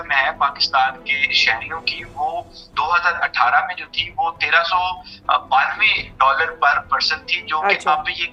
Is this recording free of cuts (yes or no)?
yes